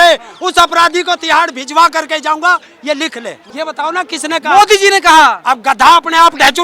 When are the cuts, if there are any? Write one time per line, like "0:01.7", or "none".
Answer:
0:03.4

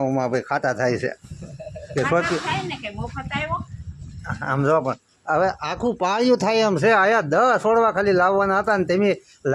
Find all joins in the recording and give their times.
none

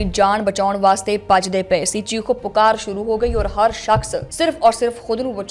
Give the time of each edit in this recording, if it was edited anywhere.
0:04.2

